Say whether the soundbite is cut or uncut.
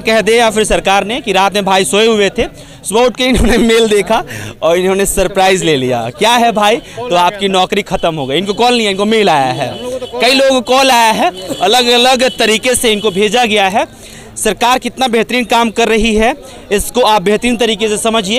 uncut